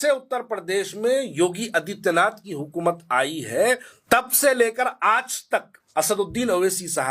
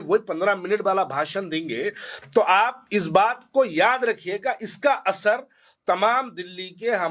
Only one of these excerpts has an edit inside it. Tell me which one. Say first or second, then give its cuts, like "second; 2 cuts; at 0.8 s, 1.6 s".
first; 2 cuts; at 3.9 s, 5.8 s